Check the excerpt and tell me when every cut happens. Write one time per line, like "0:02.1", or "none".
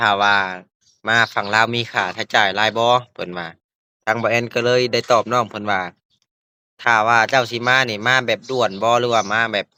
none